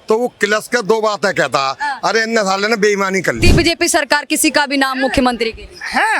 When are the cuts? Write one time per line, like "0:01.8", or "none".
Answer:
0:03.4

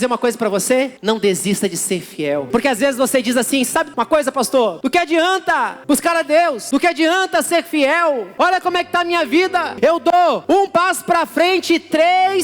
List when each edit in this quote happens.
0:01.0
0:02.5
0:03.9
0:04.8
0:05.8
0:06.6
0:08.3
0:09.7
0:10.4

